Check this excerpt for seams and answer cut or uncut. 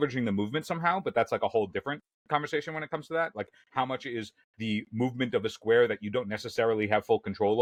uncut